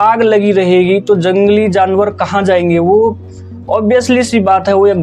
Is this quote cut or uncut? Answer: uncut